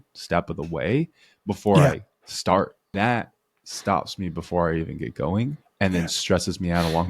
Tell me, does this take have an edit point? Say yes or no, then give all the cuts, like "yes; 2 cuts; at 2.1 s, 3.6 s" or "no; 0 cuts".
yes; 2 cuts; at 2.9 s, 5.6 s